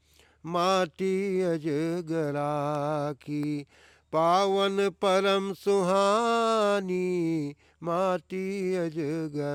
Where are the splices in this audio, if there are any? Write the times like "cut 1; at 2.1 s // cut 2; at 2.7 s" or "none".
none